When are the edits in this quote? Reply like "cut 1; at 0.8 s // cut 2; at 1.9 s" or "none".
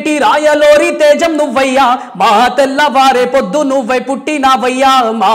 none